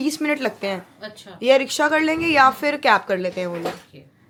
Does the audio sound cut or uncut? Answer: uncut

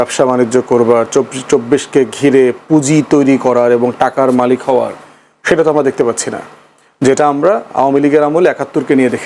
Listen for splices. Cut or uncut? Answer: uncut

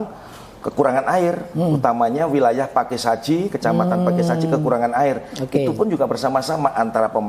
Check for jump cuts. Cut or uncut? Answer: uncut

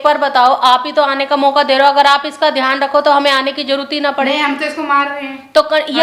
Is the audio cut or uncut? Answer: uncut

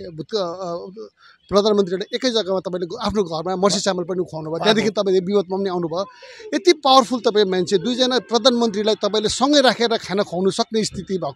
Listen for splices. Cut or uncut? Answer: uncut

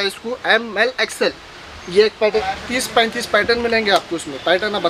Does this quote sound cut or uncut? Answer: cut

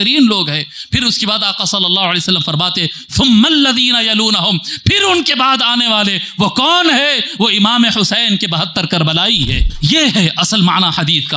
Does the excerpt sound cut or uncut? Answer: cut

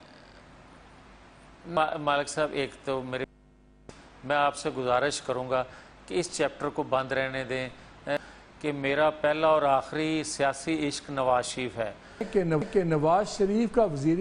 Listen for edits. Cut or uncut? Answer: cut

